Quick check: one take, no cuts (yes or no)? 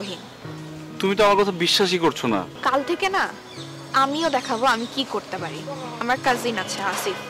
no